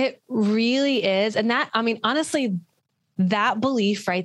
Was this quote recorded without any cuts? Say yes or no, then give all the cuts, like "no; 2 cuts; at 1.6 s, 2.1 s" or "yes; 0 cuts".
yes; 0 cuts